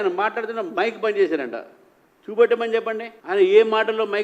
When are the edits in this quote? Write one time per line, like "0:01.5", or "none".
0:03.1